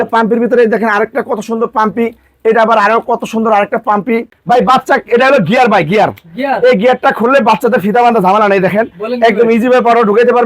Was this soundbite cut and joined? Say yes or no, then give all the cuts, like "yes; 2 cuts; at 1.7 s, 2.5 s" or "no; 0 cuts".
yes; 1 cut; at 4.3 s